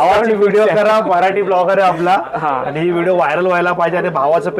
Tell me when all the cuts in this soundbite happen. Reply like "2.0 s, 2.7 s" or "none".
none